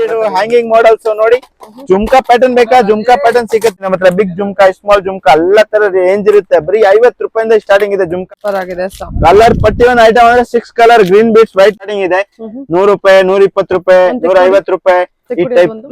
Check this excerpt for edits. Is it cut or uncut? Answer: cut